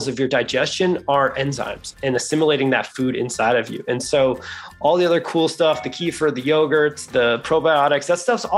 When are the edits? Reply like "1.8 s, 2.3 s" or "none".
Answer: 1.9 s